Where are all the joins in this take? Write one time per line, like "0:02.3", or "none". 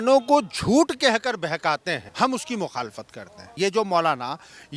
0:02.1
0:03.5